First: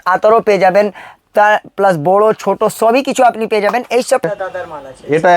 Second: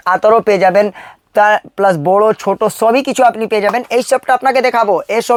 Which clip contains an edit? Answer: first; 1 cut; at 4.2 s

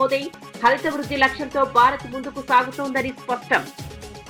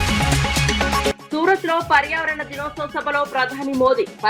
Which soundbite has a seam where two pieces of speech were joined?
second; 1 cut; at 1.1 s

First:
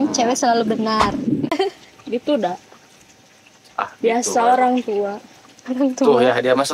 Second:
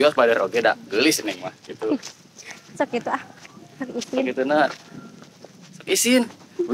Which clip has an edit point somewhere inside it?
first; 1 cut; at 1.5 s

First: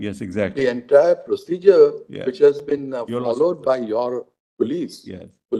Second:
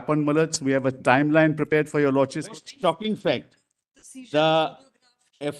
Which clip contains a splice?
second; 1 cut; at 2.5 s

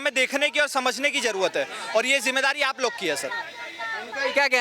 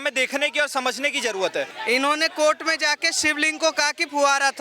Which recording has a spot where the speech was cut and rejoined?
second; 1 cut; at 1.8 s

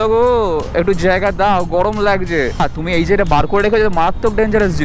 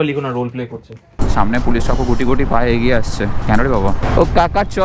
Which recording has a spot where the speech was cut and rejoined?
second; 2 cuts; at 1.1 s, 4.0 s

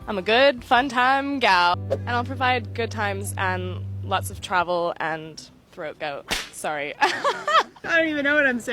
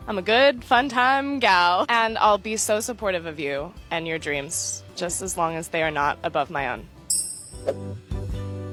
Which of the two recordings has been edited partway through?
first; 2 cuts; at 1.7 s, 7.8 s

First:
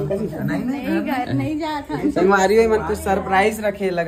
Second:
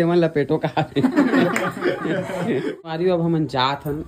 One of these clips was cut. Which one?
second; 1 cut; at 2.9 s

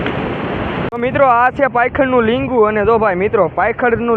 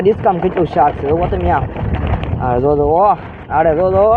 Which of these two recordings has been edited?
first; 1 cut; at 0.9 s

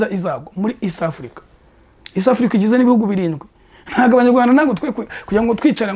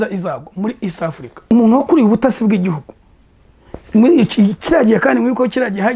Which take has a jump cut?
second; 1 cut; at 1.5 s

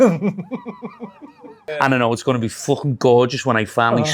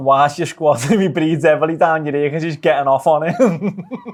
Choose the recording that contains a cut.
first; 1 cut; at 1.8 s

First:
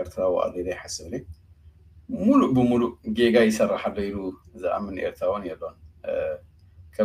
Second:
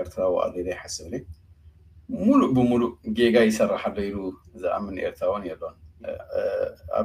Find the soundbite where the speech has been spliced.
second; 1 cut; at 6.1 s

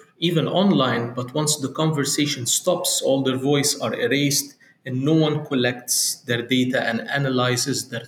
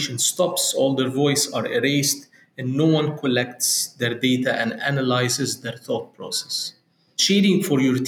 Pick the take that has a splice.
second; 1 cut; at 7.2 s

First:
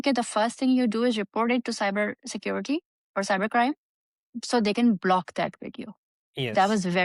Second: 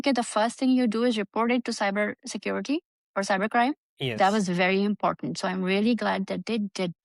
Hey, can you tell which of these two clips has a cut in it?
second; 1 cut; at 3.9 s

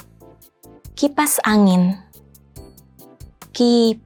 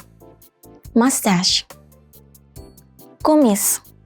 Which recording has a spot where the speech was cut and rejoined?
second; 1 cut; at 0.9 s

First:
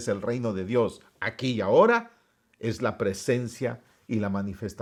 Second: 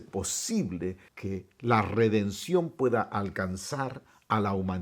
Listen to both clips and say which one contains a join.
second; 1 cut; at 1.1 s

